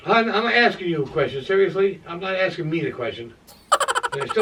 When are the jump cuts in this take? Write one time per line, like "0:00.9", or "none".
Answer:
none